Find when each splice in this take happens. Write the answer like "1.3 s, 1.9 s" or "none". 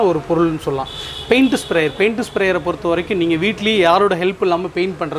none